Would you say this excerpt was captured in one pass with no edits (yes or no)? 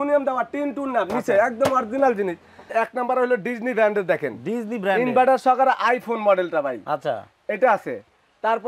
no